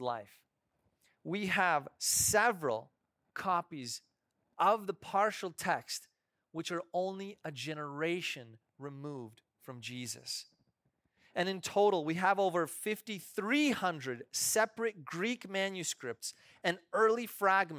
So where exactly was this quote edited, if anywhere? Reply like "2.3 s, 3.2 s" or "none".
none